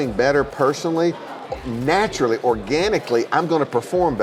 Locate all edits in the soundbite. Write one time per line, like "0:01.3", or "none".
none